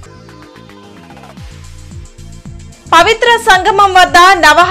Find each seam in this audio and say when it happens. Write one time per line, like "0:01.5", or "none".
0:02.7